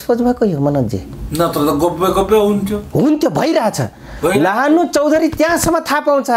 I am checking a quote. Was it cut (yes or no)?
no